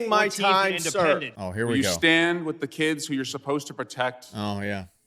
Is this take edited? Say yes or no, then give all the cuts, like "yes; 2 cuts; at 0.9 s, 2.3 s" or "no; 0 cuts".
yes; 1 cut; at 1.4 s